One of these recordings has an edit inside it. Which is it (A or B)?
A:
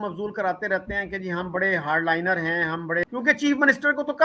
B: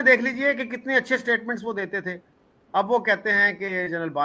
A